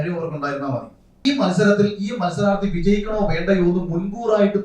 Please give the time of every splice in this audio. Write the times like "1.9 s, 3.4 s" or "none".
1.2 s